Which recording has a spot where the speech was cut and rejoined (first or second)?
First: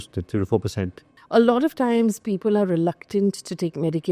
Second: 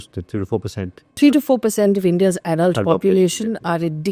first